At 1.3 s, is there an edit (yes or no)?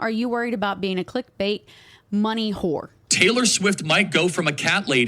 no